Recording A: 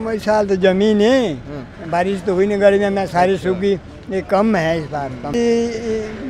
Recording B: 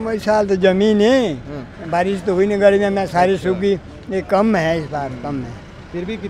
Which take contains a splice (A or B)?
A